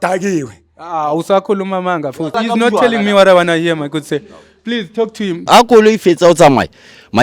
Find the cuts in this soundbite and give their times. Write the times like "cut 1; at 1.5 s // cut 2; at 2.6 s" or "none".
cut 1; at 5.5 s